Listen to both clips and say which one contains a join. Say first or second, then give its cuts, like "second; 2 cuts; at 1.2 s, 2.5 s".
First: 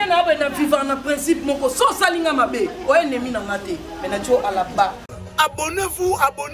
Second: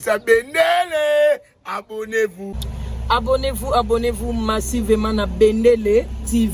first; 1 cut; at 5.2 s